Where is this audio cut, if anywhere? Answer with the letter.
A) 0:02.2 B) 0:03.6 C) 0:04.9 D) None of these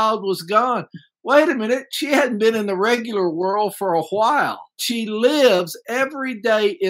C